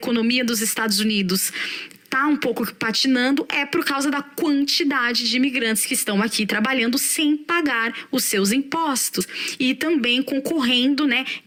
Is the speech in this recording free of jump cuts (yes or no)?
yes